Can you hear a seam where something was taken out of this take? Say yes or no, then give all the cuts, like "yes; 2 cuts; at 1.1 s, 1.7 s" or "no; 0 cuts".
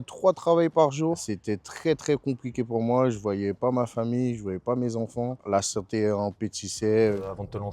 no; 0 cuts